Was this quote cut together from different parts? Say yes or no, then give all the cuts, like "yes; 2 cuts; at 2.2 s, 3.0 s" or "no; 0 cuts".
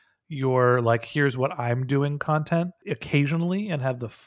yes; 1 cut; at 2.8 s